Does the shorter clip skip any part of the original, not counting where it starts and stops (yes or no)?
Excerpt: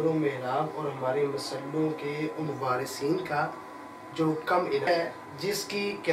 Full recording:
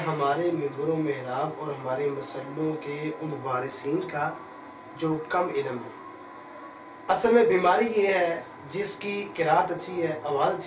yes